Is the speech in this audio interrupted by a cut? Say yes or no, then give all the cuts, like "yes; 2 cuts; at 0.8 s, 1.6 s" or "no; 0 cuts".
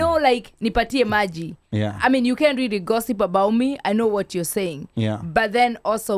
no; 0 cuts